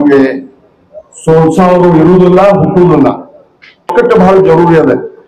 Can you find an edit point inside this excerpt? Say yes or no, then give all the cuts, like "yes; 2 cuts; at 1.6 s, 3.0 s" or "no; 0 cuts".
yes; 1 cut; at 3.9 s